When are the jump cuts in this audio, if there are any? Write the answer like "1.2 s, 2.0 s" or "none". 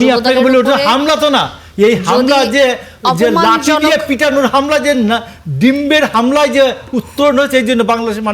none

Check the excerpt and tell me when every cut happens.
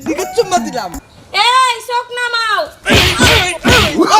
1.3 s

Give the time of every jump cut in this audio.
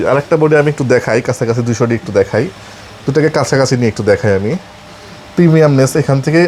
none

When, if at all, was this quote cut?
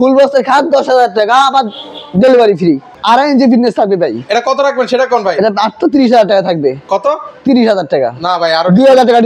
2.9 s

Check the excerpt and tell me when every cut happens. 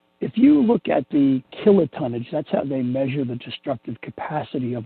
1.5 s

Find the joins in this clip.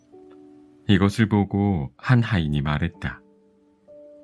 0.8 s, 3.3 s

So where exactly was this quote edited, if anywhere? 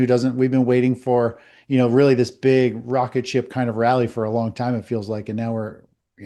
none

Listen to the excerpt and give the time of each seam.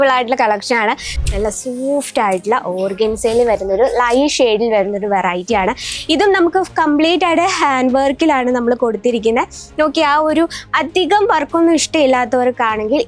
1.2 s

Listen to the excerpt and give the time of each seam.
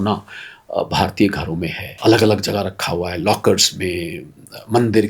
1.8 s

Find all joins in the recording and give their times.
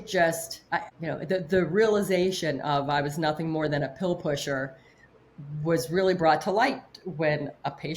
0.9 s

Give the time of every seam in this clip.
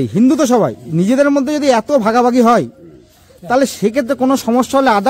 none

